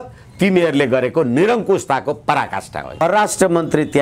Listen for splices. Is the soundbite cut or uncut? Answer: cut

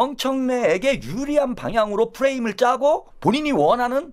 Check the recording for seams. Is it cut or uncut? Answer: cut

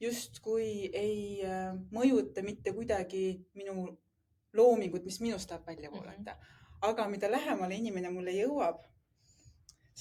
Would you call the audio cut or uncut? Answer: uncut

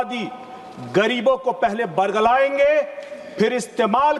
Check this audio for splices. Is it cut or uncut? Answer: uncut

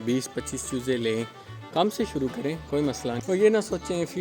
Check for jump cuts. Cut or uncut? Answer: cut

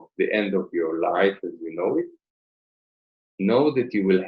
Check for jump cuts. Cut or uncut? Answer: uncut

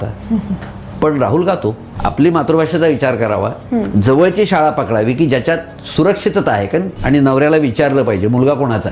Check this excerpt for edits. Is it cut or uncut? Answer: cut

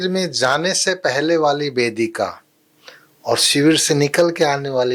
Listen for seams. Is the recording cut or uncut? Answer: uncut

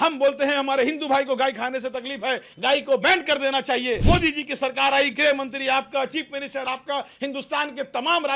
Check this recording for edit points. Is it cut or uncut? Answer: cut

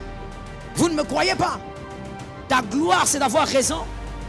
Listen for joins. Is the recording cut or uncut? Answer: uncut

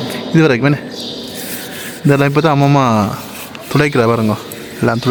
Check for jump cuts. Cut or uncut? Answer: uncut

